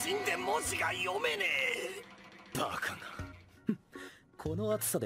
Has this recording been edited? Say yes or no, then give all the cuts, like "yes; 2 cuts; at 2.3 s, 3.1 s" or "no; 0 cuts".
no; 0 cuts